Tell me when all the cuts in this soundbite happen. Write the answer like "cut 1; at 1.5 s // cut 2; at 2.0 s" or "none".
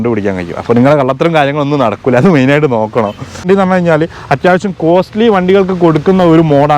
cut 1; at 3.4 s